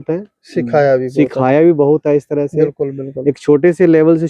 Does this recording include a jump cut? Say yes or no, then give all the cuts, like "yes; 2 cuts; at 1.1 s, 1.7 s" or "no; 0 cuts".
no; 0 cuts